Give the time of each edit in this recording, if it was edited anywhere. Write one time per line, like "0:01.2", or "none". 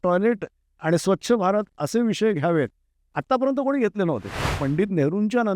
0:04.6